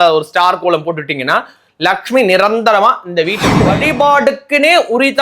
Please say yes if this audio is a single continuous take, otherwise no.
no